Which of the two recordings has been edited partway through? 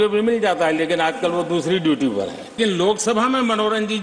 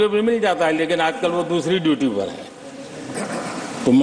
first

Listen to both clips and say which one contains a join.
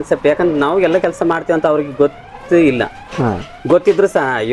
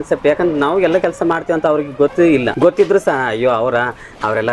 second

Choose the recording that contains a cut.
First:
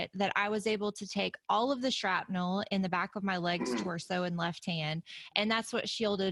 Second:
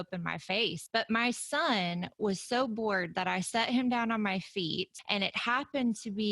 second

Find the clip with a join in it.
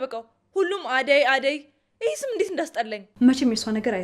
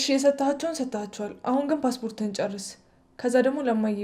first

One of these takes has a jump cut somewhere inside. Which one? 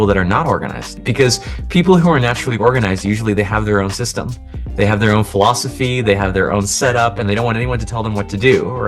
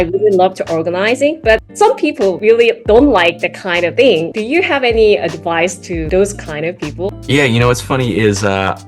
second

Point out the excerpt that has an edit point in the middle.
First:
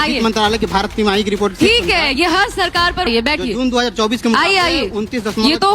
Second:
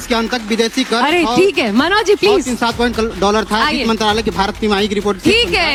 first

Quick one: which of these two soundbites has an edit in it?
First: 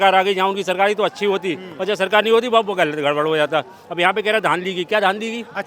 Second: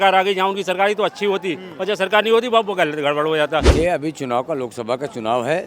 second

